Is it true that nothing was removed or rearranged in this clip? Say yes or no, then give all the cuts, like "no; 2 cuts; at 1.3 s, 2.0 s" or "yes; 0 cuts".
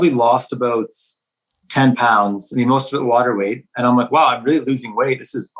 yes; 0 cuts